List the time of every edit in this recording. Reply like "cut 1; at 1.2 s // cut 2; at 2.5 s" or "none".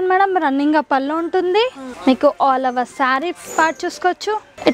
none